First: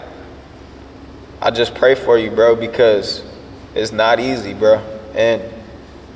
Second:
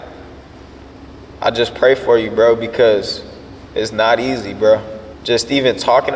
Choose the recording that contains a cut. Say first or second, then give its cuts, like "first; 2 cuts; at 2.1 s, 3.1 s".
second; 1 cut; at 5.0 s